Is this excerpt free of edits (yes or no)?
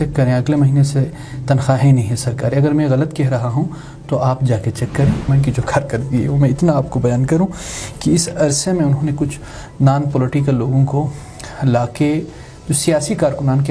no